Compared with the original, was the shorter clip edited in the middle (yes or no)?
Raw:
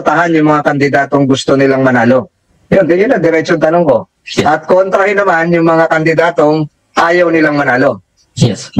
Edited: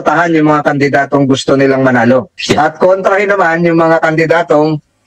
yes